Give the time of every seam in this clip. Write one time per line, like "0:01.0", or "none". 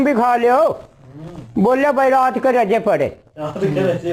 none